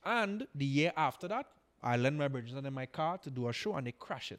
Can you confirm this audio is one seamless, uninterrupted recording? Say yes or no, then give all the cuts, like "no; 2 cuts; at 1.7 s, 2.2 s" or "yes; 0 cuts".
yes; 0 cuts